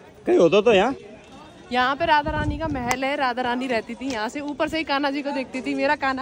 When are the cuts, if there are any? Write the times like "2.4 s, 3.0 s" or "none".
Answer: none